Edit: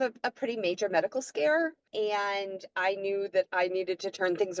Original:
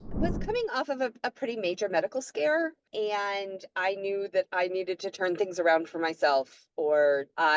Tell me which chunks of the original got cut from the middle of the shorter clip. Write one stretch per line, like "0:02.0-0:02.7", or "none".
none